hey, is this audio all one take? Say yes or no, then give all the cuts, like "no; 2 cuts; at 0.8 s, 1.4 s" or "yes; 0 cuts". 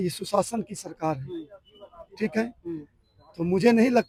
yes; 0 cuts